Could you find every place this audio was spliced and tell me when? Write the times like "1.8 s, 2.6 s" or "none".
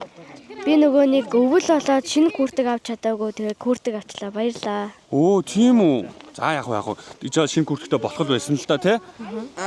none